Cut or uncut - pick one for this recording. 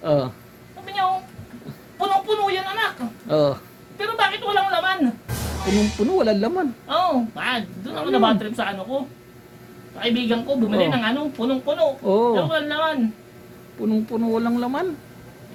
uncut